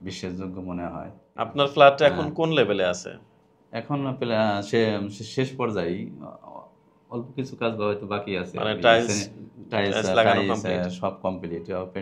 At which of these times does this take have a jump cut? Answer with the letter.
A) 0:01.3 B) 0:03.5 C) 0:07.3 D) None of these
A